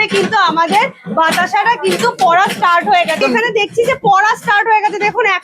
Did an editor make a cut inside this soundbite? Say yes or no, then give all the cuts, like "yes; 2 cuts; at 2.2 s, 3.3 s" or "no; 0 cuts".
yes; 1 cut; at 3.2 s